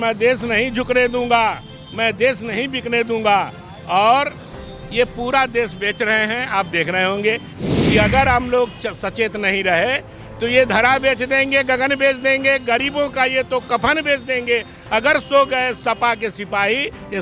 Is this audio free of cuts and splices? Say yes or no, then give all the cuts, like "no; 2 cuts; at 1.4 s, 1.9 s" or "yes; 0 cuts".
no; 1 cut; at 7.6 s